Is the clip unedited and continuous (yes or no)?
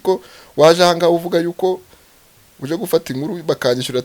yes